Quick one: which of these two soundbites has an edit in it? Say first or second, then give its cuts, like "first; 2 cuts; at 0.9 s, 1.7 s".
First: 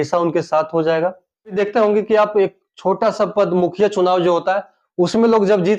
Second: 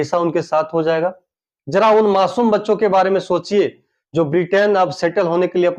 first; 1 cut; at 1.6 s